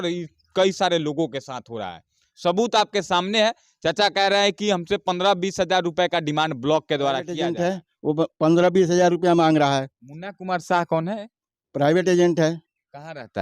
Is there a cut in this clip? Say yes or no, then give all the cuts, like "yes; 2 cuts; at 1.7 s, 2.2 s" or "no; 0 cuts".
yes; 1 cut; at 7.4 s